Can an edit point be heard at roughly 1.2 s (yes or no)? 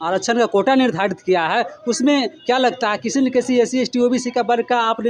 no